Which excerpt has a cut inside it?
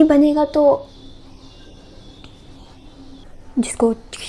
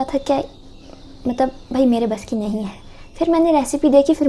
first; 1 cut; at 3.2 s

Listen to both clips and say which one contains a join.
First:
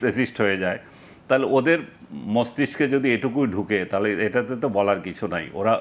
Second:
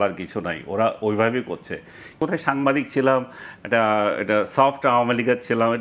second; 1 cut; at 2.2 s

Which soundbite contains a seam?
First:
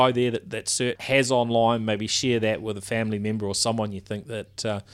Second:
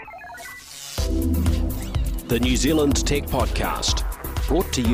first; 1 cut; at 1.0 s

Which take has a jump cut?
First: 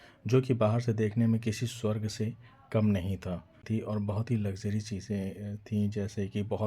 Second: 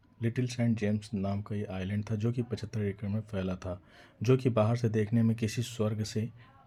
first; 1 cut; at 3.6 s

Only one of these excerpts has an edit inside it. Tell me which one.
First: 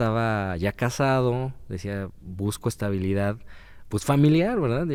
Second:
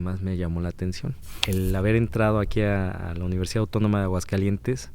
second; 1 cut; at 1.4 s

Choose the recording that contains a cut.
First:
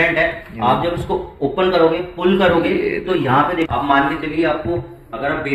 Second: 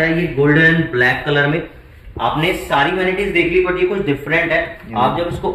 first; 1 cut; at 3.7 s

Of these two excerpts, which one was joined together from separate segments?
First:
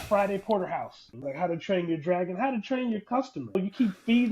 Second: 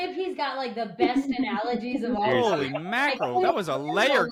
first; 2 cuts; at 1.1 s, 3.5 s

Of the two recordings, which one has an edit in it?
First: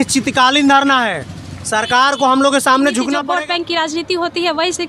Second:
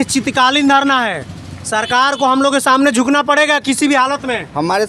first; 1 cut; at 3.2 s

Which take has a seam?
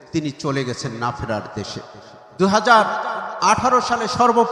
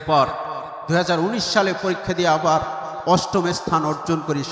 first; 1 cut; at 2.2 s

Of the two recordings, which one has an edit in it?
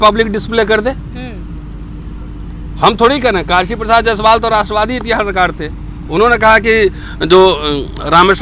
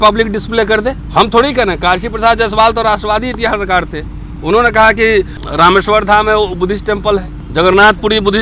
second; 3 cuts; at 1.0 s, 5.4 s, 7.4 s

